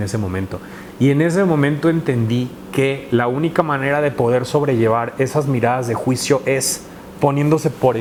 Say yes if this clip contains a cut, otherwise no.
no